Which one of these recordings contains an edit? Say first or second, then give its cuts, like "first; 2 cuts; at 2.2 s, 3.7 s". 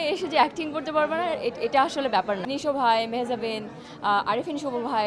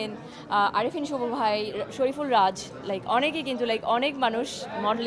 first; 1 cut; at 2.5 s